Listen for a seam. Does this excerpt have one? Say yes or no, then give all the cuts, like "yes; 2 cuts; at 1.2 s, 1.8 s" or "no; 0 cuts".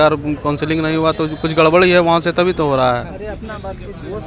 no; 0 cuts